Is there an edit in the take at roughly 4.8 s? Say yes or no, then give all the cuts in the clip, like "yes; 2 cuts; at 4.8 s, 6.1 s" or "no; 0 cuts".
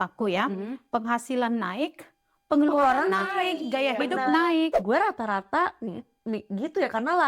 yes; 1 cut; at 4.8 s